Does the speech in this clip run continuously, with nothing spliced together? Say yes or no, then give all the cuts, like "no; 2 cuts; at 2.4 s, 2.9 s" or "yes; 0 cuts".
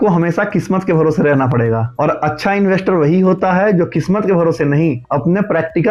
yes; 0 cuts